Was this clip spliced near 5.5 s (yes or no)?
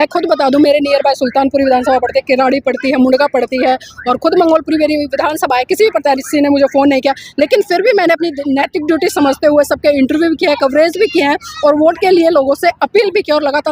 no